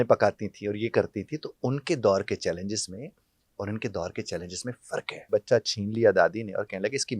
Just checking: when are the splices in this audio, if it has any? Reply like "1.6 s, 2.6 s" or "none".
5.3 s